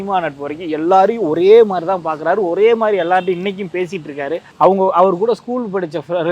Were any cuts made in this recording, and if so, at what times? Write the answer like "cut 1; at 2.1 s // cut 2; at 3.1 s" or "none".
cut 1; at 4.4 s